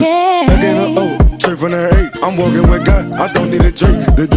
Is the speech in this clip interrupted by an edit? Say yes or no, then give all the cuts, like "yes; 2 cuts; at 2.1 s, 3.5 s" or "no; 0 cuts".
no; 0 cuts